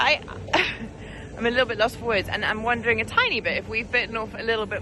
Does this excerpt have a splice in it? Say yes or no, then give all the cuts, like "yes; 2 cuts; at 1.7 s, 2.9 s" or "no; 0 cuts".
no; 0 cuts